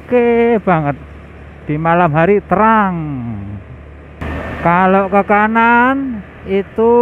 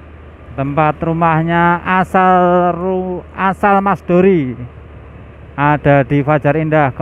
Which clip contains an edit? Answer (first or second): first